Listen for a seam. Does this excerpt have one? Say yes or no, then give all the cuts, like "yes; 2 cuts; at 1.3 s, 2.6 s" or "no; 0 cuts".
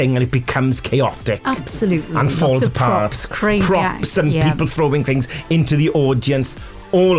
no; 0 cuts